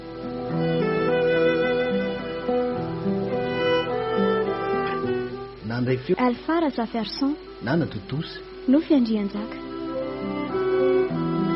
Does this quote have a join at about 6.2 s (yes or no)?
yes